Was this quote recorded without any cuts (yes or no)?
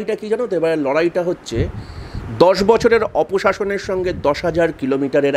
yes